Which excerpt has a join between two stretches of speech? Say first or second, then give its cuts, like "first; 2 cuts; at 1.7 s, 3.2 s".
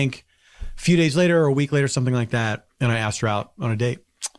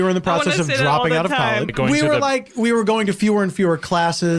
second; 1 cut; at 1.7 s